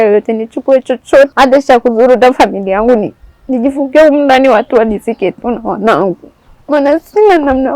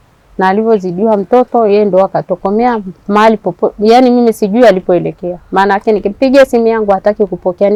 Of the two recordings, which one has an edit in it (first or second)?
first